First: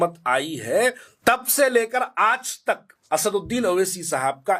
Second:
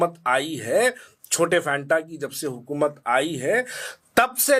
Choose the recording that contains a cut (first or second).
first